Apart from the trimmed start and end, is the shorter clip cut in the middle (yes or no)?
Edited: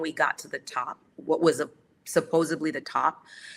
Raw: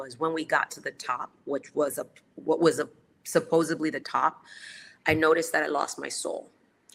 yes